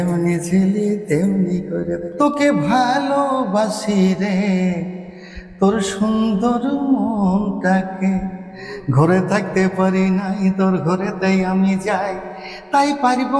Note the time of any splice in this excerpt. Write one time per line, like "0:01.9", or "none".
0:02.1